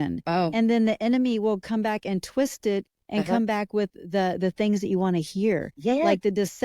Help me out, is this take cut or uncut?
uncut